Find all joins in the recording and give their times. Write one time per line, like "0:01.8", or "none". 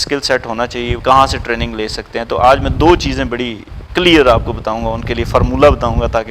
0:01.0